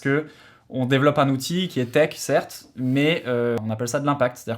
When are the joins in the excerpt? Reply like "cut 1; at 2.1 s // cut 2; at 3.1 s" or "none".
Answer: cut 1; at 3.6 s